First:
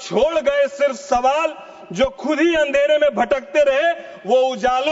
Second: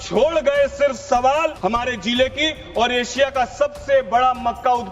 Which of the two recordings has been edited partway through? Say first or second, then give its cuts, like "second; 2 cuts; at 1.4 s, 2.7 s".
second; 1 cut; at 1.6 s